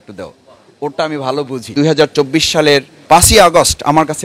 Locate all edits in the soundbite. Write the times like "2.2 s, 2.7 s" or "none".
1.6 s